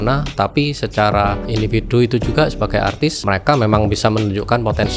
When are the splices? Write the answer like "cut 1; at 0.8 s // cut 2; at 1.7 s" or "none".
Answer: cut 1; at 1.4 s // cut 2; at 3.2 s

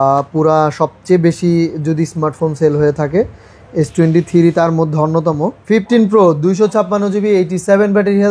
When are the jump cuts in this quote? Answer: cut 1; at 5.6 s

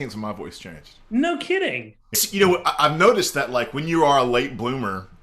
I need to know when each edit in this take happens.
cut 1; at 2.2 s

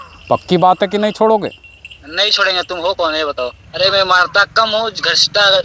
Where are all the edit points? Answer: cut 1; at 3.6 s

